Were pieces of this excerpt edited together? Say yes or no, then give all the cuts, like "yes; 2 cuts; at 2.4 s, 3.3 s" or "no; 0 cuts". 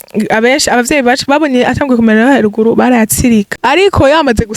yes; 1 cut; at 3.5 s